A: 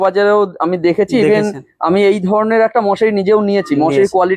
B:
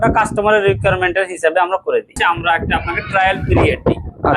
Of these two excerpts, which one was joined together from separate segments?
B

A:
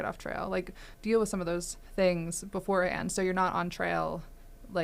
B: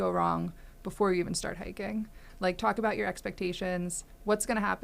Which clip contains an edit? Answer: A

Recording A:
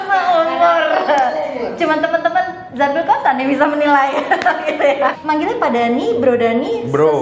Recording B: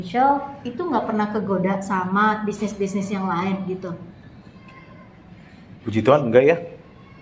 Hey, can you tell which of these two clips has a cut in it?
A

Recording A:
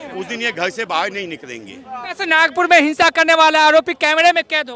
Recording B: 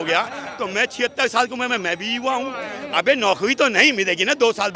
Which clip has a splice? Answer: A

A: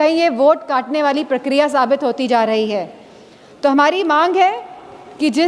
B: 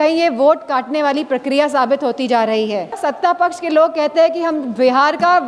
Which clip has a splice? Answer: B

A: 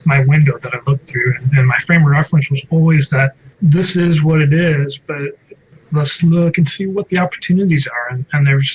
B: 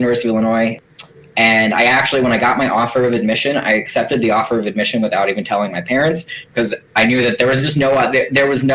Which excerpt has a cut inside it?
A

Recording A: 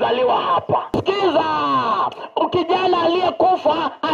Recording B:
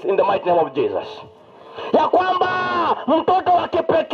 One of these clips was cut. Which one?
A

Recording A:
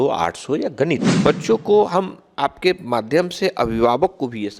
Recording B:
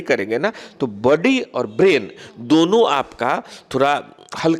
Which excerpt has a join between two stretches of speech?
A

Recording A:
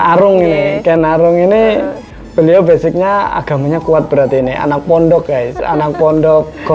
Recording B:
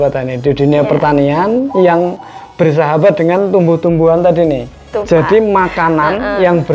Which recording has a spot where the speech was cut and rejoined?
B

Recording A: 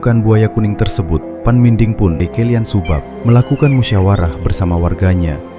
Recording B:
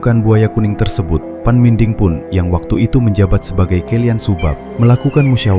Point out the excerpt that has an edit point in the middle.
A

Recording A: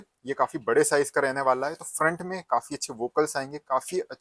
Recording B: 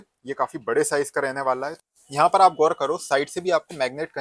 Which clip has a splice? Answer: B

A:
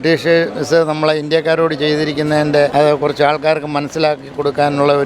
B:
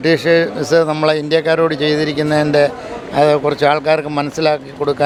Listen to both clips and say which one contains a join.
A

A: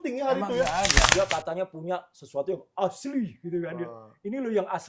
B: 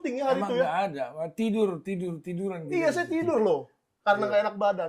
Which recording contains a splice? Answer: A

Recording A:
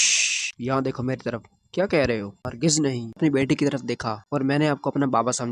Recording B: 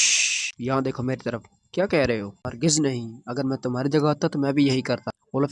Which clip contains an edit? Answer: A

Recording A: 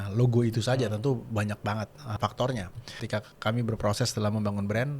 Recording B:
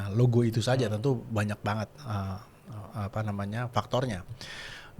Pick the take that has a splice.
A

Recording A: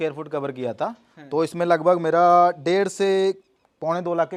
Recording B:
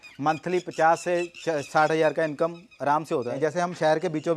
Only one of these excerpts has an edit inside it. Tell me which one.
B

